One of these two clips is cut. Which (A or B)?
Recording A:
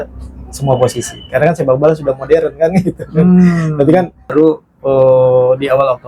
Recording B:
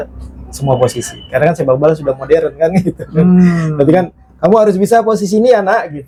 A